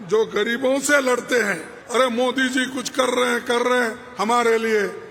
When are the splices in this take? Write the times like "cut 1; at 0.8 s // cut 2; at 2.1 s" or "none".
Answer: cut 1; at 1.7 s